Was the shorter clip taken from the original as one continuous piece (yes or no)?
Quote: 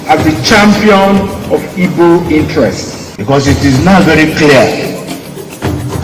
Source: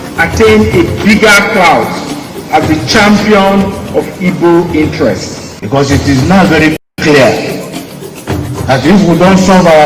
no